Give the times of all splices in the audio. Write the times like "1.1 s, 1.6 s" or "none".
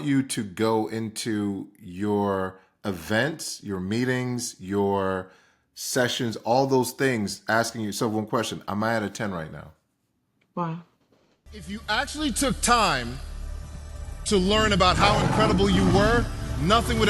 11.5 s